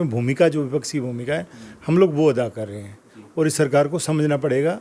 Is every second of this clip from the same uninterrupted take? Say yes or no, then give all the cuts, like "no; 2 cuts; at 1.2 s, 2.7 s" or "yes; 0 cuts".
yes; 0 cuts